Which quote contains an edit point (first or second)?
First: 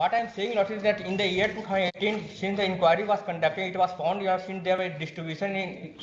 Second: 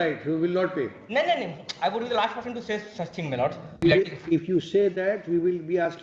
second